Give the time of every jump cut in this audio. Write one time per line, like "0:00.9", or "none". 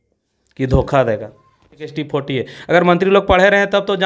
0:01.9